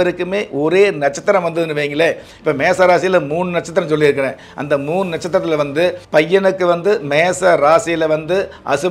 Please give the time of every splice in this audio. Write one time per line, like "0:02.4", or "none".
0:06.0

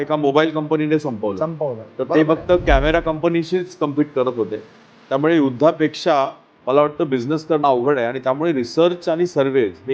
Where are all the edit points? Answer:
none

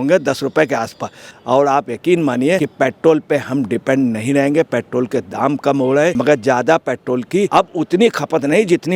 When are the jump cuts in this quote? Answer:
0:01.3
0:02.7
0:06.1
0:07.5

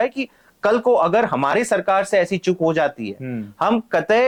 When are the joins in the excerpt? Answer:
none

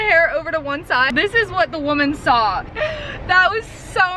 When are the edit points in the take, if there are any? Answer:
0:01.1
0:02.7

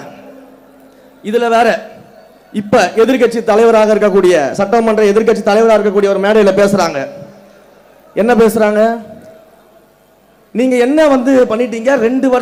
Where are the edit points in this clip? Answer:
none

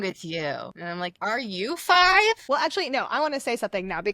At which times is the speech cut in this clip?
0:01.0
0:02.4

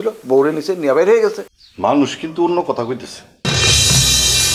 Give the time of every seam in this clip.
0:01.5

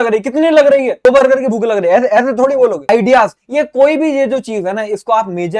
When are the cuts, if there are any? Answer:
0:01.0
0:02.8

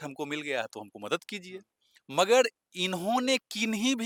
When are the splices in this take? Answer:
none

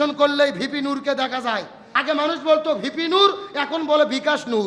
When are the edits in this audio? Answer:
0:01.9

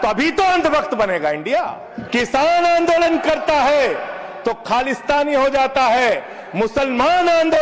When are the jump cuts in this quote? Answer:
0:01.9

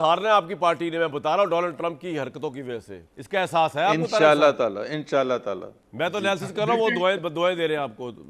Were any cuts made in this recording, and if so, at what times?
none

